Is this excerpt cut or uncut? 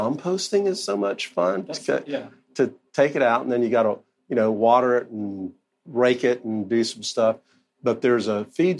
uncut